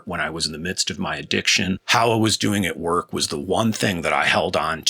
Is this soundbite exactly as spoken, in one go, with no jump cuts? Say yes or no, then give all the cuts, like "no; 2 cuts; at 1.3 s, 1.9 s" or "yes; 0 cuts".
no; 1 cut; at 1.8 s